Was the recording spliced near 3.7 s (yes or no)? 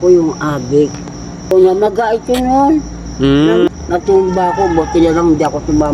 yes